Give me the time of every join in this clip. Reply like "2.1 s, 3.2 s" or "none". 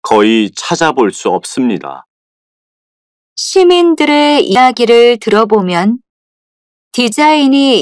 4.6 s